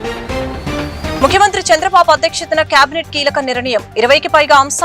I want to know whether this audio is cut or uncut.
cut